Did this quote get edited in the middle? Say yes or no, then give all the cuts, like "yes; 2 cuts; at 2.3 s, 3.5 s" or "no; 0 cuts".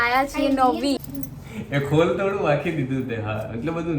yes; 1 cut; at 1.0 s